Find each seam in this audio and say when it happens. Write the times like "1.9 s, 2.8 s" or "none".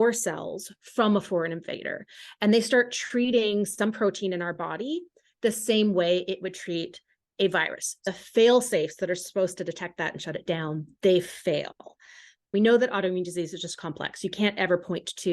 8.0 s, 12.5 s